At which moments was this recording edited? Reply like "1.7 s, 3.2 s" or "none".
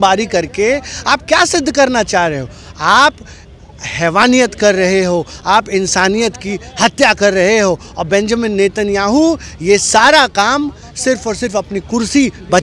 none